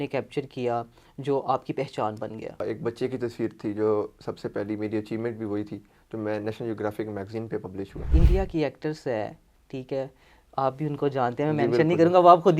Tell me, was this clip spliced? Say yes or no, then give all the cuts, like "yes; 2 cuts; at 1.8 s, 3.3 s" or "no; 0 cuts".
yes; 2 cuts; at 2.6 s, 8.1 s